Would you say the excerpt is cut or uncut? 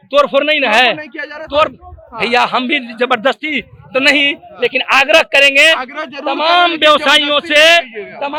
uncut